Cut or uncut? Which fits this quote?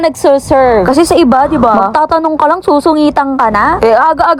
uncut